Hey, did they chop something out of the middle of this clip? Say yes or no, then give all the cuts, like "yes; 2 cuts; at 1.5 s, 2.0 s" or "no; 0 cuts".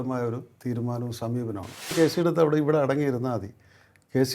yes; 1 cut; at 1.9 s